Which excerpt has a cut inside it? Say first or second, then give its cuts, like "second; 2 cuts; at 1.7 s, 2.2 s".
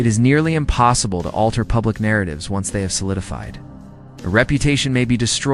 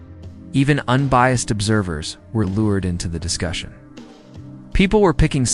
first; 2 cuts; at 1.7 s, 2.8 s